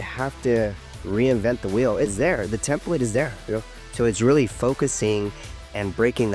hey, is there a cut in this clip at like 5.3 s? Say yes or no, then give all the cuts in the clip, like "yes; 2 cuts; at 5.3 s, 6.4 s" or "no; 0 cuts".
no; 0 cuts